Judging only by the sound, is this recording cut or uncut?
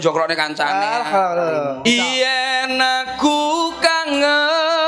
cut